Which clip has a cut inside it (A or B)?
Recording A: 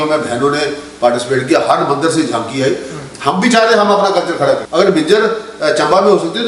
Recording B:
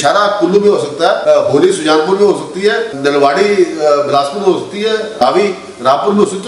B